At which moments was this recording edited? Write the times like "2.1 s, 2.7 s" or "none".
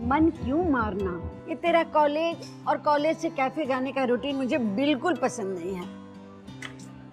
1.6 s